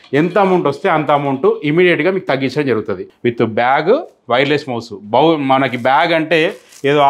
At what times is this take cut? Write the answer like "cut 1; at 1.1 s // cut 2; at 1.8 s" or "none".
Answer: cut 1; at 3.1 s